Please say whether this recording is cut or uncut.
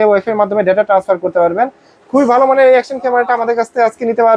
uncut